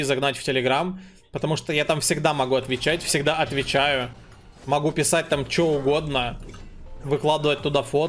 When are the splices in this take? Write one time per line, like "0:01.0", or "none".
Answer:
none